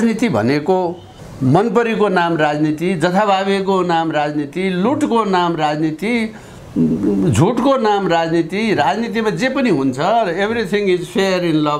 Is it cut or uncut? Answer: uncut